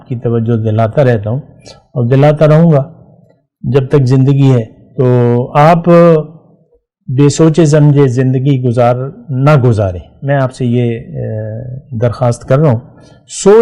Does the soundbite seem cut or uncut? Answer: uncut